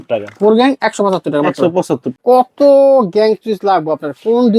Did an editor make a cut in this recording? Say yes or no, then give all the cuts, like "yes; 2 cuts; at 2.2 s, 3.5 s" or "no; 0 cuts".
yes; 1 cut; at 2.1 s